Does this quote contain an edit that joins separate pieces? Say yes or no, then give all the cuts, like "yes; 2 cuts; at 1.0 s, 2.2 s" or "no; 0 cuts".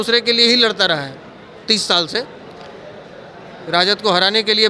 no; 0 cuts